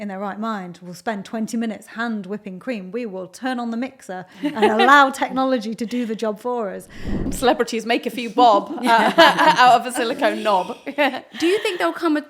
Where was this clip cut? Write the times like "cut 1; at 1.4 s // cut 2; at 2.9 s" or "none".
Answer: cut 1; at 7.2 s